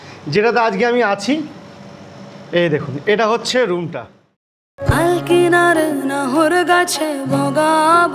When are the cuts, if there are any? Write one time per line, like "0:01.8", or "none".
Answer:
0:04.7